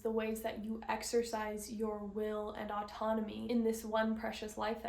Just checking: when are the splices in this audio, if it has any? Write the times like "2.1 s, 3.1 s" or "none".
3.4 s